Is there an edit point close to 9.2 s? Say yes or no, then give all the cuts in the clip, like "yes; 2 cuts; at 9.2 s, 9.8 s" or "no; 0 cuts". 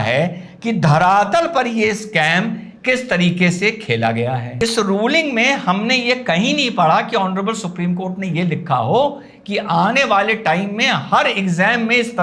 no; 1 cut; at 4.5 s